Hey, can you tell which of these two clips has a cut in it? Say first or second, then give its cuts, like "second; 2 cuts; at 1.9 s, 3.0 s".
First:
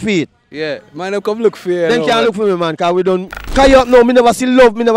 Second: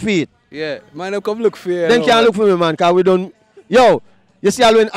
first; 1 cut; at 3.4 s